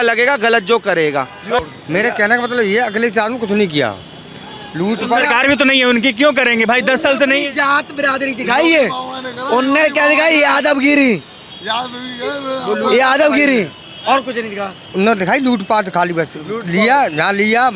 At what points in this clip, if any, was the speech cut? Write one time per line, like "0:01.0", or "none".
0:01.6

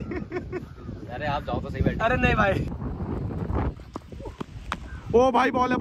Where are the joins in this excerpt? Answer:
0:02.7

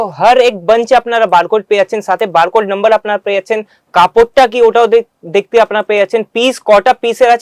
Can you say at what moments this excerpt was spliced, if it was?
none

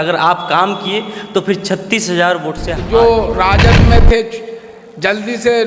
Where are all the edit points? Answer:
0:02.7

